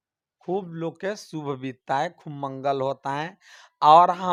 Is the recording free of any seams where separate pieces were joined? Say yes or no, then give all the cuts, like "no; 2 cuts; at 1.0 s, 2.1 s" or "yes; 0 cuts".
yes; 0 cuts